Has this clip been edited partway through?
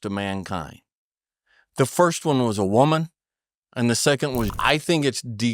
yes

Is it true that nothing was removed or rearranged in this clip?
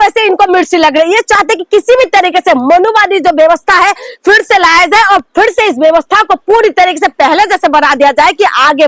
yes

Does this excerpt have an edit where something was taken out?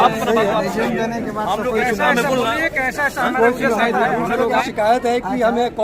yes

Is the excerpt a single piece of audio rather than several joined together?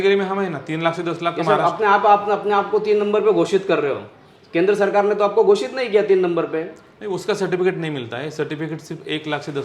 yes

